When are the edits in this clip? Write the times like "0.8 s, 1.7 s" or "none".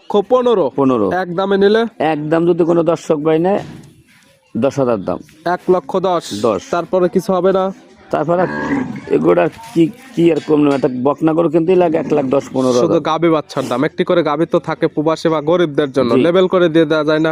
none